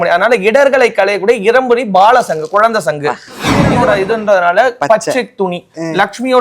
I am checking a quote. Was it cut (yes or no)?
yes